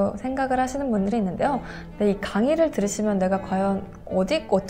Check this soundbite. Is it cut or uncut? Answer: cut